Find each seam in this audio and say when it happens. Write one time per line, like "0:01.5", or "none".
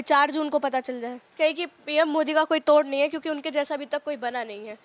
0:01.3

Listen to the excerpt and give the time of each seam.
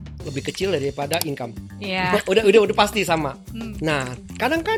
none

